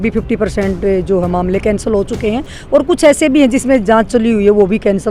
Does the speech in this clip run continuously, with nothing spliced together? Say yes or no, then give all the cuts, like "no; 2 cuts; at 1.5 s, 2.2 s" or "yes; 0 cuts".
yes; 0 cuts